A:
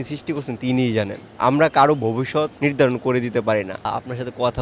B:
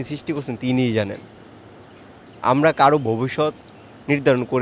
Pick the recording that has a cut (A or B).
A